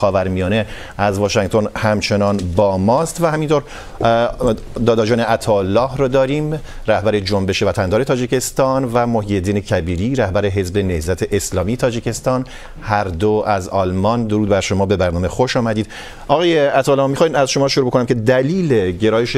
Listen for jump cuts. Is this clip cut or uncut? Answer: uncut